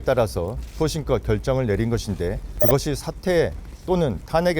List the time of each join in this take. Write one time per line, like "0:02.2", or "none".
0:02.5